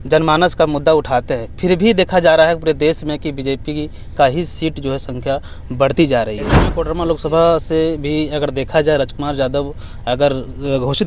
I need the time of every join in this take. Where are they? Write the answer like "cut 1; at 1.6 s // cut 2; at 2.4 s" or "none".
cut 1; at 6.8 s